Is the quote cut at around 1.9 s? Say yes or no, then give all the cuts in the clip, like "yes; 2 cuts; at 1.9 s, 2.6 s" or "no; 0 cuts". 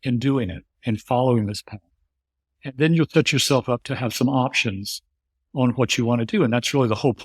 no; 0 cuts